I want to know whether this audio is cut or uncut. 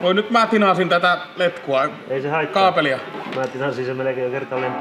uncut